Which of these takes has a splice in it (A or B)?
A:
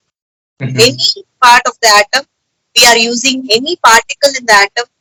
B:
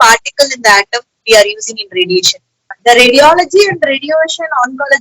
B